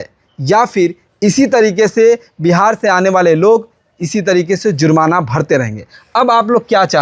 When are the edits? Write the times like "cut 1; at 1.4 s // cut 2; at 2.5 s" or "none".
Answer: none